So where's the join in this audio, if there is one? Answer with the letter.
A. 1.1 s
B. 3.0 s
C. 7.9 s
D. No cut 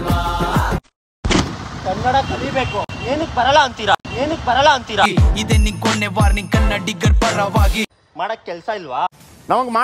C